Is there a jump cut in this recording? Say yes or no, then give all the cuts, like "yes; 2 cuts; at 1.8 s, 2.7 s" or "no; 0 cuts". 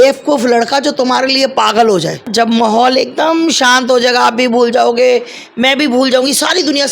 yes; 1 cut; at 2.3 s